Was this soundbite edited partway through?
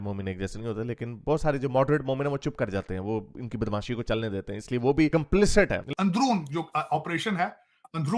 yes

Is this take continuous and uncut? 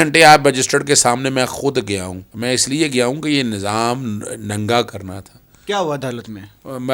yes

